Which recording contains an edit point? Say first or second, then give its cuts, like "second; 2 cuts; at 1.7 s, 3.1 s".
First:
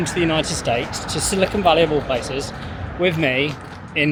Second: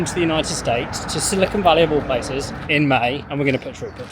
second; 2 cuts; at 2.6 s, 3.2 s